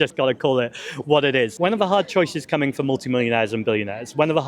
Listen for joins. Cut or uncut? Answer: cut